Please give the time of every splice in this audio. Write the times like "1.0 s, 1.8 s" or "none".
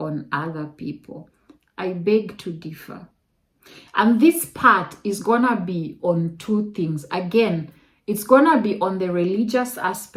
none